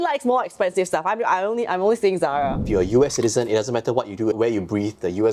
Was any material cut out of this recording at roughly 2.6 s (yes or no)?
yes